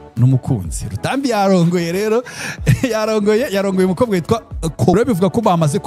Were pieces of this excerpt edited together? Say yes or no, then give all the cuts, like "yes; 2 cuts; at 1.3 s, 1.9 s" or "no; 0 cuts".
yes; 1 cut; at 4.9 s